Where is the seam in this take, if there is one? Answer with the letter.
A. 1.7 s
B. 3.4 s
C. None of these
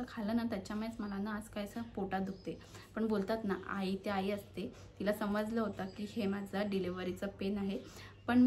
C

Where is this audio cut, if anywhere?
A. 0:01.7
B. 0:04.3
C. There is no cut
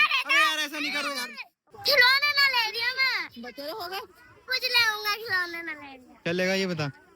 A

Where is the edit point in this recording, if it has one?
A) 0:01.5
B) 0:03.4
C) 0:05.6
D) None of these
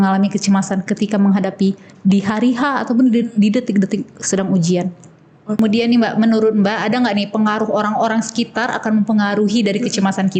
C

